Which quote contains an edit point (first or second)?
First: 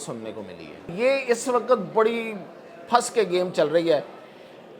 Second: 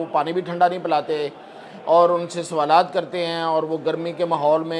first